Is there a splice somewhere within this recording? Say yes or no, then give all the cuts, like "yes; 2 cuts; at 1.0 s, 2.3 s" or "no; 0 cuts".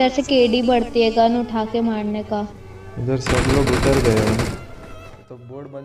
yes; 1 cut; at 4.7 s